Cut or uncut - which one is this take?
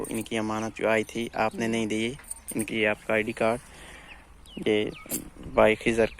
cut